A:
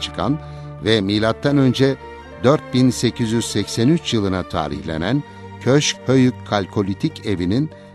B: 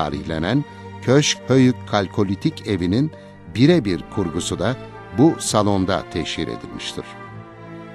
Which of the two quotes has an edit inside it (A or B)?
B